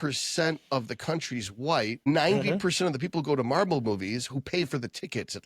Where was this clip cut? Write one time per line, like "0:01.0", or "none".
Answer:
0:02.1